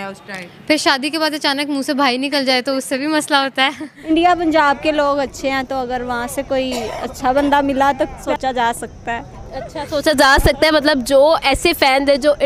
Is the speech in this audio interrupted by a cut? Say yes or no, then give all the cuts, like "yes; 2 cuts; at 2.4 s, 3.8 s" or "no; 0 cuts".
yes; 2 cuts; at 3.9 s, 8.2 s